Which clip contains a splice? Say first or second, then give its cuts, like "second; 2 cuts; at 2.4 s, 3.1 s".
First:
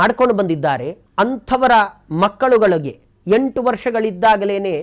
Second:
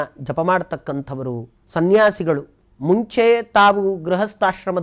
first; 1 cut; at 1.0 s